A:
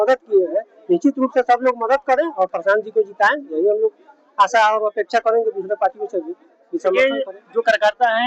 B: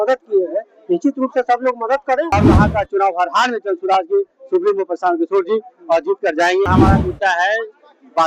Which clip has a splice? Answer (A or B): B